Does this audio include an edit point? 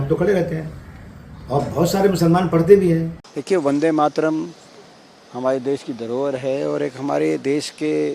yes; 1 cut; at 3.3 s

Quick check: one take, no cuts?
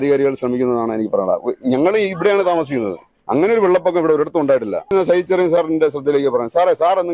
no; 1 cut; at 4.9 s

